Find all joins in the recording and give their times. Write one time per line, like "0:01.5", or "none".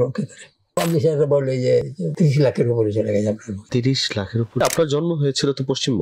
0:00.8
0:02.0
0:03.5
0:04.6